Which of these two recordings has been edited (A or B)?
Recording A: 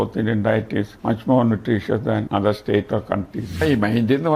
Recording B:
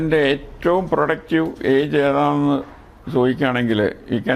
A